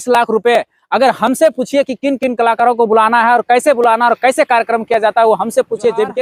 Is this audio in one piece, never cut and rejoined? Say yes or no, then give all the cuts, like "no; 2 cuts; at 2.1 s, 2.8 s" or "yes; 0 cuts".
yes; 0 cuts